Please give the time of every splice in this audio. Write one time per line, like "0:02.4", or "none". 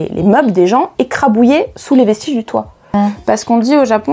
0:02.9